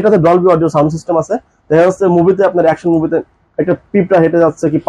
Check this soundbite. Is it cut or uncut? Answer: uncut